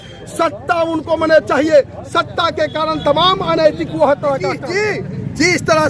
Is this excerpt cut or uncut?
cut